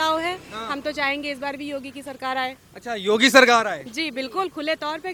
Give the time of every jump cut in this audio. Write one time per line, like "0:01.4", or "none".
none